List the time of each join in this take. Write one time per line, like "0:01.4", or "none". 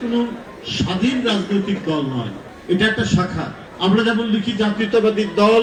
none